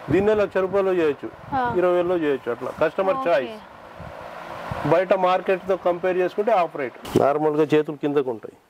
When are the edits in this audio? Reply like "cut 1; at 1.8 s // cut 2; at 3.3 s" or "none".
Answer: cut 1; at 7.0 s